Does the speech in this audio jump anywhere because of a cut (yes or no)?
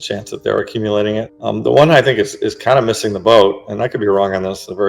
yes